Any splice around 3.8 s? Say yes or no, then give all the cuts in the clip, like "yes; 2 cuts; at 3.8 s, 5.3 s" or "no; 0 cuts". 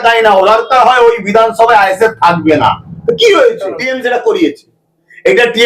yes; 1 cut; at 3.8 s